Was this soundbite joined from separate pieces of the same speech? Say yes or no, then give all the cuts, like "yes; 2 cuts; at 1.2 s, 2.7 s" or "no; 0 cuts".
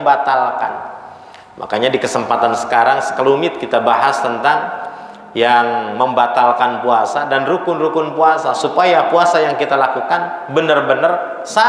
no; 0 cuts